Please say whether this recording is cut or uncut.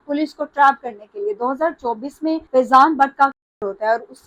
uncut